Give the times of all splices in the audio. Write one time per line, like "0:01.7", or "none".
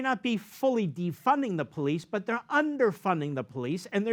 none